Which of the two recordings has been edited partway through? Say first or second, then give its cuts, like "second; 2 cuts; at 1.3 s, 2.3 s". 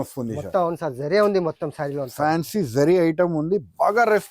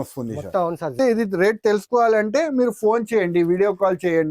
second; 1 cut; at 0.9 s